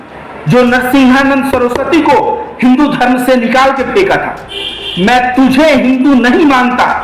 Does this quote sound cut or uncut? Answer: uncut